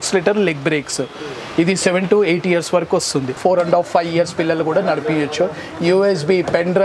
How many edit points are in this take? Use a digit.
1